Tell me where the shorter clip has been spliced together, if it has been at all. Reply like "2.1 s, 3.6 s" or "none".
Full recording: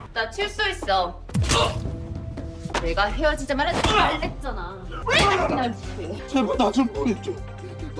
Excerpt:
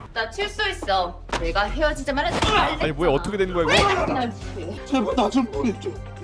1.2 s